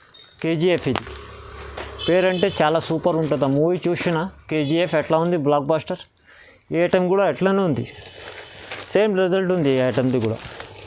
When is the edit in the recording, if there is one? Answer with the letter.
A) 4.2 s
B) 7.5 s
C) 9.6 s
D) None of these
D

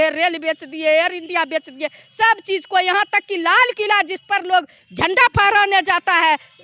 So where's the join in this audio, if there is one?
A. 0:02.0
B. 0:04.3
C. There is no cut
C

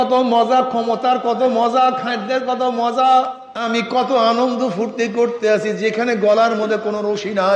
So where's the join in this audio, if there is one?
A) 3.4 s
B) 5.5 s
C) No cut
A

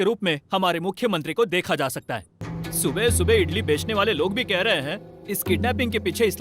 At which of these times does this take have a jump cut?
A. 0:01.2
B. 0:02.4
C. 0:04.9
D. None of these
B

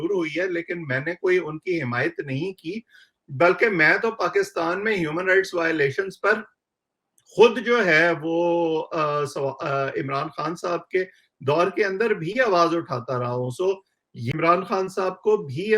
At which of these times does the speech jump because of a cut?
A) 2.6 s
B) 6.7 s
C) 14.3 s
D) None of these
C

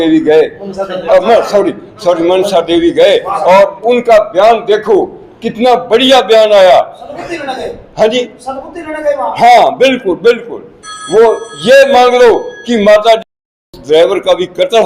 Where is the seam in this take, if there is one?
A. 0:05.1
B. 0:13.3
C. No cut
B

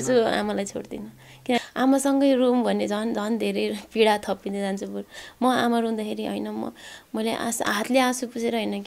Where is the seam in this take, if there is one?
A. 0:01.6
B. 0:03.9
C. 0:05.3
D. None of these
A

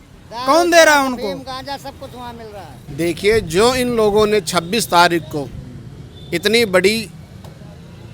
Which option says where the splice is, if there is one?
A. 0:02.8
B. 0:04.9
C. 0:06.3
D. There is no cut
A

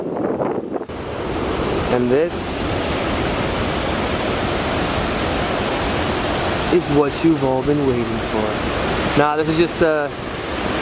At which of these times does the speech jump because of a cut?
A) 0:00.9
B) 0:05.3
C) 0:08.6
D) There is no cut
A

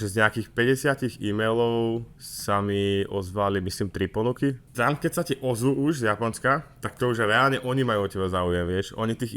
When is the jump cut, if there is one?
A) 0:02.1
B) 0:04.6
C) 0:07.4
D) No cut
B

